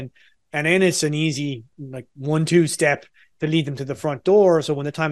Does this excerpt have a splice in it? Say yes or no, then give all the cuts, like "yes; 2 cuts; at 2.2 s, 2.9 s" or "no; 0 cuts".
yes; 1 cut; at 1.7 s